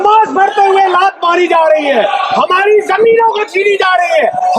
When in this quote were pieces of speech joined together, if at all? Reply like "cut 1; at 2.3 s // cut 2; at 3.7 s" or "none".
none